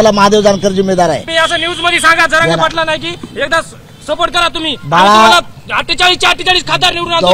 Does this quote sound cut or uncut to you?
cut